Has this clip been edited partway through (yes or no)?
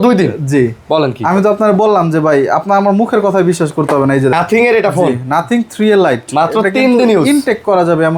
yes